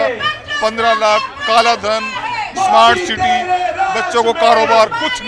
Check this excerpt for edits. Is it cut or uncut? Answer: uncut